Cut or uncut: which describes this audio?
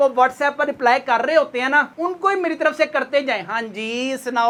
uncut